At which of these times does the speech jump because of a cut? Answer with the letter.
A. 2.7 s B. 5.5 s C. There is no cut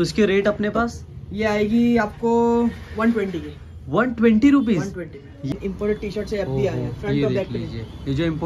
B